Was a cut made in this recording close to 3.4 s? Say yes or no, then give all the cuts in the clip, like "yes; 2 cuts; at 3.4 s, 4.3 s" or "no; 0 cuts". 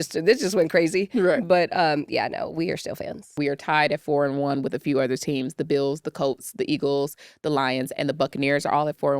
yes; 1 cut; at 3.4 s